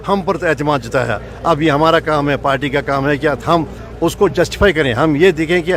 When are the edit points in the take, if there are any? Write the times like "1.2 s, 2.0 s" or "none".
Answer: none